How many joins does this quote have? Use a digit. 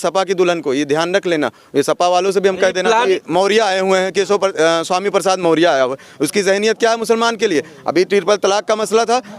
1